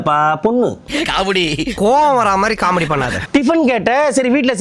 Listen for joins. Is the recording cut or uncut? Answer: cut